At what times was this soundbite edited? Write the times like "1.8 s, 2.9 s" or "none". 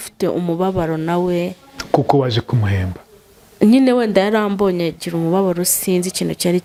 none